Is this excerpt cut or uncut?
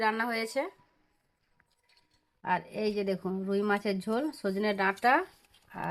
uncut